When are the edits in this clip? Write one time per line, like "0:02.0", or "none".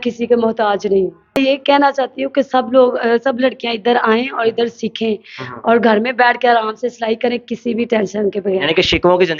0:01.4